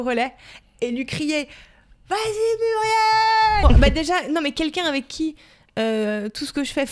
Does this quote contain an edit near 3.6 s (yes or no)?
yes